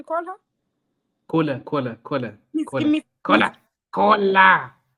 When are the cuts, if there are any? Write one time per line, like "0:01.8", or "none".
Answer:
none